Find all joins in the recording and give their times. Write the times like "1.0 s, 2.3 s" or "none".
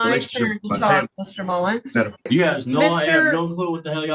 2.3 s